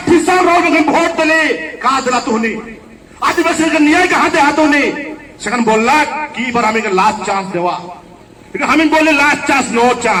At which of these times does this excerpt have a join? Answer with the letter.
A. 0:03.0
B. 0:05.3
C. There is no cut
C